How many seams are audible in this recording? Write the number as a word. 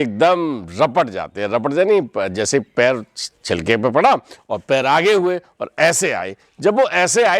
zero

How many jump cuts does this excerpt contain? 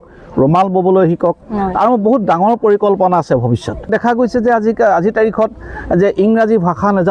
one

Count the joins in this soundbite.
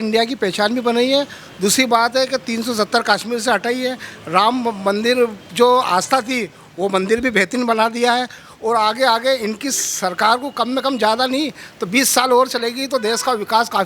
zero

